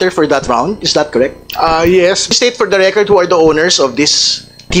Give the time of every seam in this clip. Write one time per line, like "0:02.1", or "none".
0:02.3